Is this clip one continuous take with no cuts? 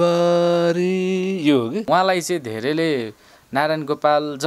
no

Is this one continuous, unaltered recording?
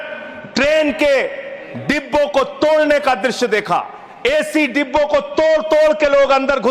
yes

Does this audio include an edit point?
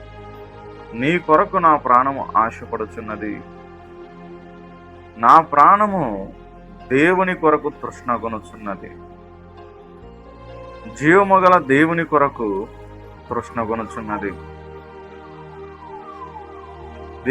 yes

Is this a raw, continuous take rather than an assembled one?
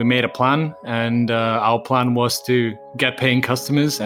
yes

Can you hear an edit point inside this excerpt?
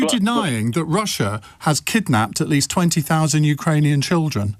no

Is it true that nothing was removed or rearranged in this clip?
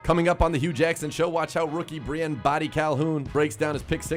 yes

